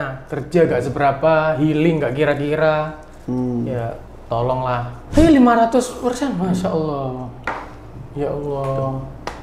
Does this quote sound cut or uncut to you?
cut